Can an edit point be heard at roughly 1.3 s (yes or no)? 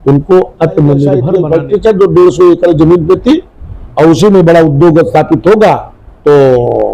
yes